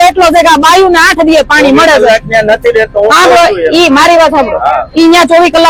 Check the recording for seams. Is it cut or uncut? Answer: uncut